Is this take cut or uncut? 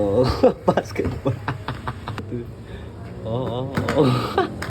cut